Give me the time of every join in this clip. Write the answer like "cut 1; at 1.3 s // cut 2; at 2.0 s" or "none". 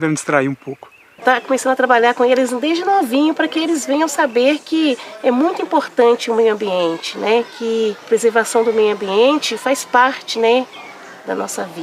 cut 1; at 1.2 s // cut 2; at 8.0 s